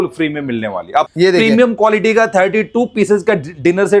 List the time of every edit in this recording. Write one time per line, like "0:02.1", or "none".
0:01.1